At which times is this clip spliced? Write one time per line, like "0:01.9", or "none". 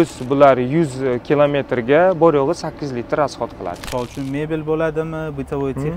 0:03.9